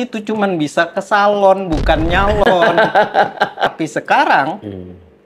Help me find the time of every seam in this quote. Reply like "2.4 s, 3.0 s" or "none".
3.8 s